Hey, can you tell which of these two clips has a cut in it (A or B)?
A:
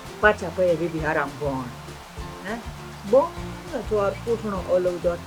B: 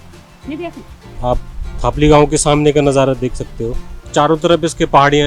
B